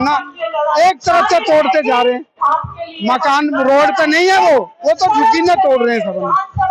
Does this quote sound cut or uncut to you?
uncut